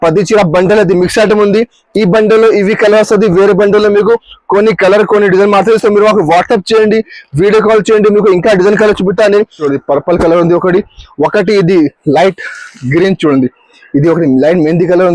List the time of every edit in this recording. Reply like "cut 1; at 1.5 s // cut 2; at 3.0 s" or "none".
cut 1; at 9.6 s

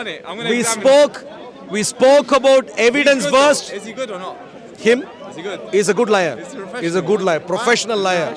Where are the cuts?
none

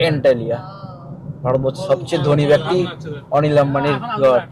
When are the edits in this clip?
none

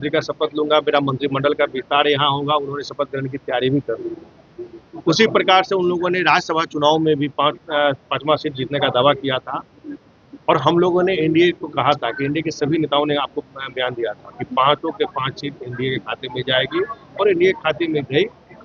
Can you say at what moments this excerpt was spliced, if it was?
none

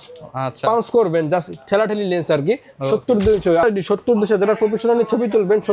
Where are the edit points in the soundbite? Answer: cut 1; at 3.6 s

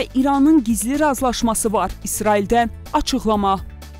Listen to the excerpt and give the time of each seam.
none

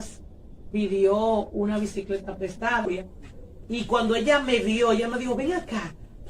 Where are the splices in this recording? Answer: cut 1; at 2.9 s

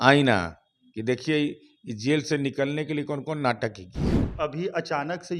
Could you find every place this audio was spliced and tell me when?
cut 1; at 4.2 s

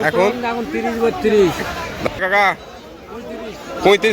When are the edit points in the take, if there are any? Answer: cut 1; at 2.1 s

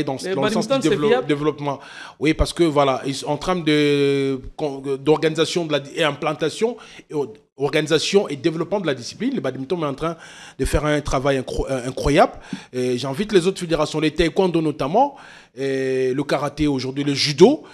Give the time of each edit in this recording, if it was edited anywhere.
none

